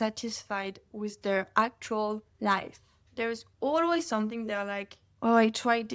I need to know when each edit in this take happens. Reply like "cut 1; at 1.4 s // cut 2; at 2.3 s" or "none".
none